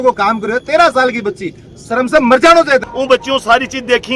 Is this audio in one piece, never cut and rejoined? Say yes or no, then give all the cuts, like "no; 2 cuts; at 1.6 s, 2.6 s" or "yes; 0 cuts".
no; 1 cut; at 2.9 s